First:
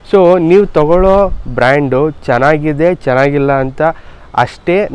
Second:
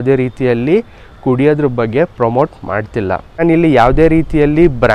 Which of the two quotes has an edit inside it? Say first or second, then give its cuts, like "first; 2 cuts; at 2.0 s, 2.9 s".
second; 1 cut; at 3.4 s